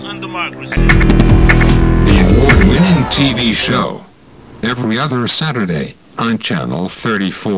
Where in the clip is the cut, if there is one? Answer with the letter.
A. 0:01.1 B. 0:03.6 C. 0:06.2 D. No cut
D